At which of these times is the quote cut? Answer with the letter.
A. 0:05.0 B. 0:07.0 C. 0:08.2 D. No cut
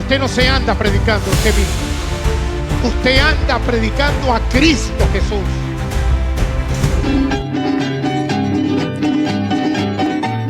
B